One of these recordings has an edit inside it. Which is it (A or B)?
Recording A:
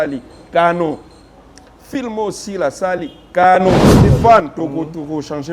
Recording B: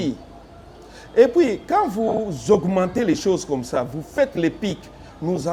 A